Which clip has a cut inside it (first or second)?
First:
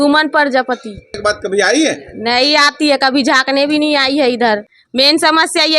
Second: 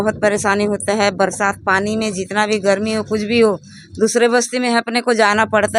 first